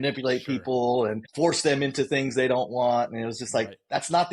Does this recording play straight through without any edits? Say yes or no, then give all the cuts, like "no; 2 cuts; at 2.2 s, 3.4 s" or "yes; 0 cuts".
no; 1 cut; at 1.2 s